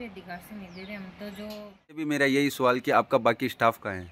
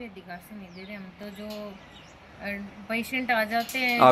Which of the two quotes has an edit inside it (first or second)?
first